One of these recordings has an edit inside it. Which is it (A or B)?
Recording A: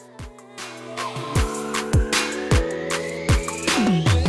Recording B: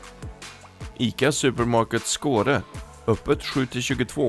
B